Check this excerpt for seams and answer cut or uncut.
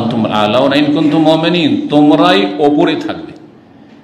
uncut